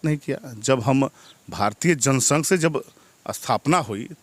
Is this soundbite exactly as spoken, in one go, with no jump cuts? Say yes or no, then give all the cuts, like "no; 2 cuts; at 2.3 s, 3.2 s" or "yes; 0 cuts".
yes; 0 cuts